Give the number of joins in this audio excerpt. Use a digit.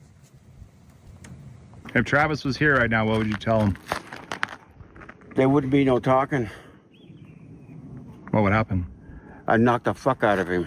1